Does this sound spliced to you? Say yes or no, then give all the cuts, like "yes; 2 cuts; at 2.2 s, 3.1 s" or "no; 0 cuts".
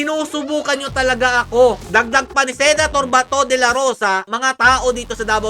yes; 1 cut; at 1.8 s